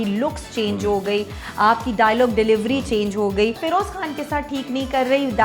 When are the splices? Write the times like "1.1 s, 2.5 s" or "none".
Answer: 3.6 s